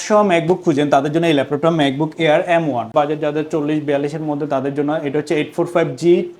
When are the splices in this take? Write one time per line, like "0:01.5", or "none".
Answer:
0:02.9

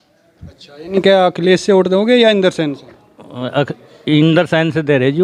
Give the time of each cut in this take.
none

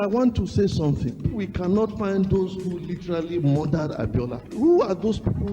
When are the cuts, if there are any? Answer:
0:01.3

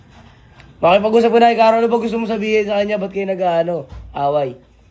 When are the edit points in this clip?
none

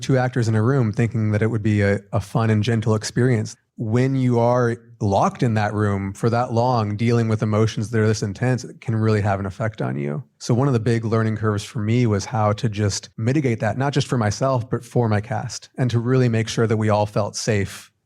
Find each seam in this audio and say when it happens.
0:03.5
0:04.9
0:10.3
0:13.1

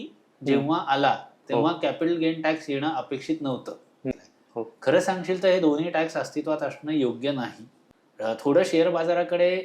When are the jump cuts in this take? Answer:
0:04.1
0:07.8

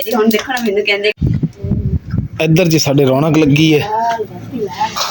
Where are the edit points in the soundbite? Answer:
0:01.1

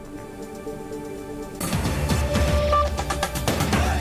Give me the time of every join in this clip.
none

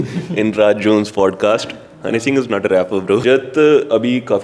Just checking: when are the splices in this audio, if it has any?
0:03.2

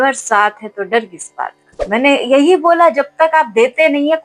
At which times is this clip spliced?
0:01.8

